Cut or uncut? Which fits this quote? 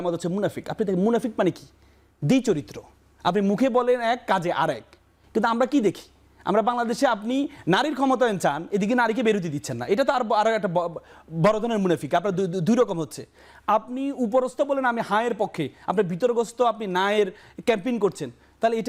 uncut